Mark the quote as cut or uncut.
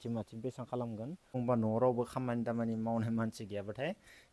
cut